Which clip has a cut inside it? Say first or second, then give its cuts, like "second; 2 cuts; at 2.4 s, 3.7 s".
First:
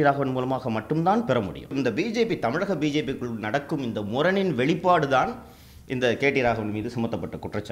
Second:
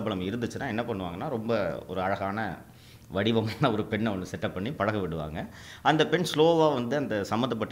first; 1 cut; at 1.7 s